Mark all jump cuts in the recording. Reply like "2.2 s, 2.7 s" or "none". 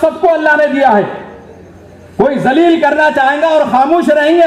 none